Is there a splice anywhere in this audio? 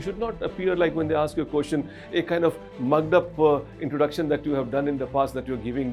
no; 0 cuts

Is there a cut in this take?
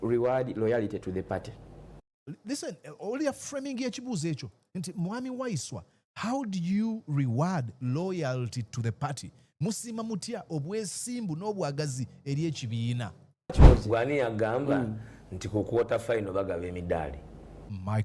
yes; 1 cut; at 13.6 s

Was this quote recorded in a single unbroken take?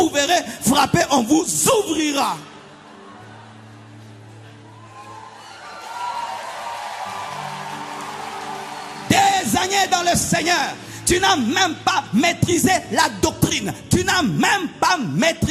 yes; 0 cuts

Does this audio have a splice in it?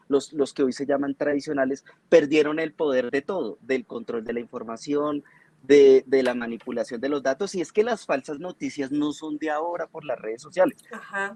no; 0 cuts

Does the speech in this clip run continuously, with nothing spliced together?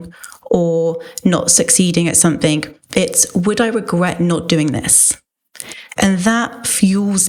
yes; 0 cuts

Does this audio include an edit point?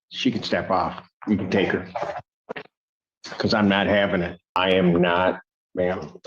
yes; 1 cut; at 4.6 s

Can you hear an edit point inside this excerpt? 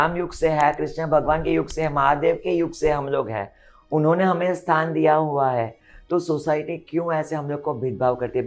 no; 0 cuts

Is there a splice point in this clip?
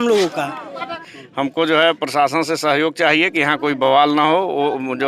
yes; 1 cut; at 1.0 s

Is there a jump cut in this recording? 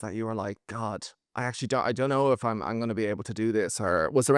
no; 0 cuts

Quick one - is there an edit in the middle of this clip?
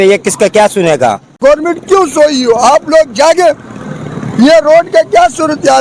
yes; 1 cut; at 1.4 s

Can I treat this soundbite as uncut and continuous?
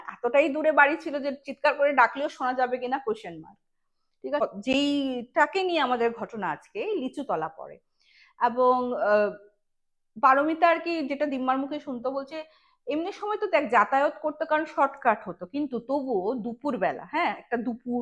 no; 1 cut; at 4.4 s

